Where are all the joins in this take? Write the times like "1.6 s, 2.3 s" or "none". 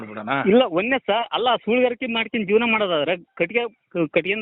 none